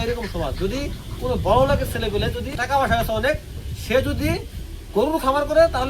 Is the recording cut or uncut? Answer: cut